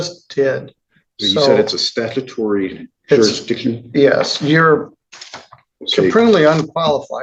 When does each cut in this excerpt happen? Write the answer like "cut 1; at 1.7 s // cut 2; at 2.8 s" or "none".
none